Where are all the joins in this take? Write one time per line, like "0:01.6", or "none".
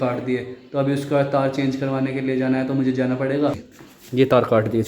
0:03.7